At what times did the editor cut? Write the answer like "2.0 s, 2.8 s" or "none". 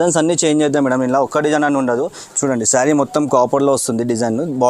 2.2 s

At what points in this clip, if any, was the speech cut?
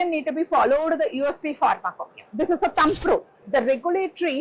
3.4 s

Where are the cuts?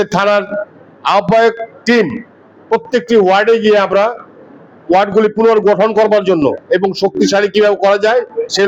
none

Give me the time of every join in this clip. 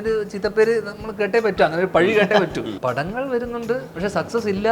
2.7 s, 3.9 s

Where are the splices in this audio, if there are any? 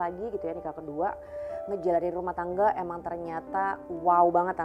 none

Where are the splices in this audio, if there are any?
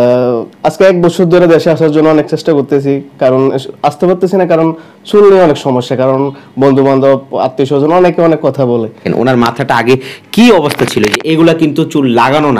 9.0 s

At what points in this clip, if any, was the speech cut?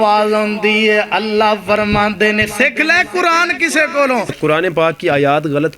4.4 s

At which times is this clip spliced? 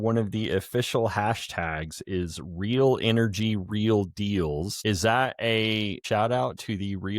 4.7 s, 6.0 s

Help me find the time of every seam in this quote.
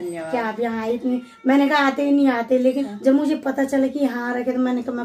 2.8 s

